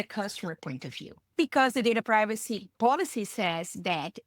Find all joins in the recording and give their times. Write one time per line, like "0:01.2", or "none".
0:01.3
0:02.7